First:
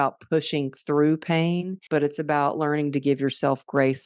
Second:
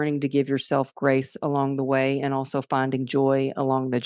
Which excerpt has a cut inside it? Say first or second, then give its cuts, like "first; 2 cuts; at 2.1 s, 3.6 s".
first; 1 cut; at 1.7 s